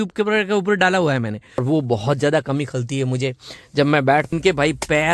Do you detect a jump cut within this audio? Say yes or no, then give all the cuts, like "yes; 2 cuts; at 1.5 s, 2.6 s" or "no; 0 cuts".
yes; 2 cuts; at 1.6 s, 4.3 s